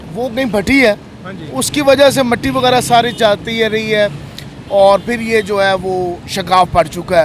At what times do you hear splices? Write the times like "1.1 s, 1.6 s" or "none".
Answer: none